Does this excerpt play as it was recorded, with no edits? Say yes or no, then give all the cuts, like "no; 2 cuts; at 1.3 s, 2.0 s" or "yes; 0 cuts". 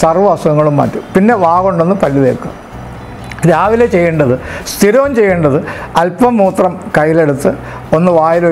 yes; 0 cuts